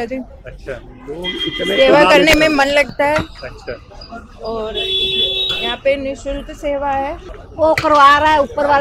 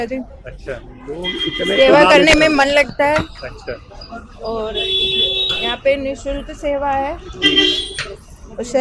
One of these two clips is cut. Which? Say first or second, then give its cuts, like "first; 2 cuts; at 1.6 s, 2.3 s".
first; 1 cut; at 7.3 s